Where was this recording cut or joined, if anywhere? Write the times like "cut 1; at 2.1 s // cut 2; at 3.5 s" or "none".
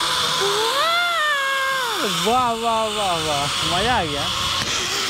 none